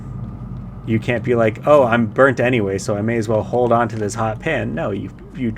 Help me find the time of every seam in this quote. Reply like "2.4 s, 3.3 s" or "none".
none